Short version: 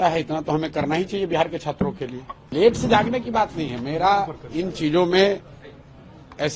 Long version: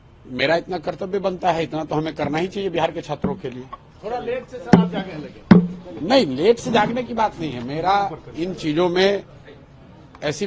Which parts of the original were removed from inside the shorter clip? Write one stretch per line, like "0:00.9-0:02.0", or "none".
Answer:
0:03.9-0:06.3